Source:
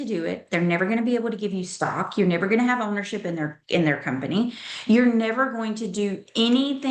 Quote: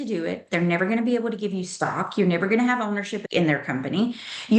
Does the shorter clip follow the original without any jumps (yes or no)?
no